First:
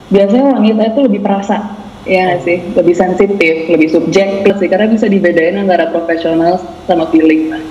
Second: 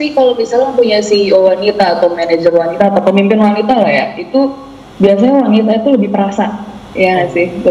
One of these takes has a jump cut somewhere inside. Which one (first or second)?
first